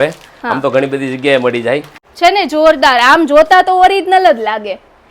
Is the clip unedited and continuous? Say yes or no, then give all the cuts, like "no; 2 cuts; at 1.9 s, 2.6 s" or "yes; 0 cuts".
no; 1 cut; at 2.0 s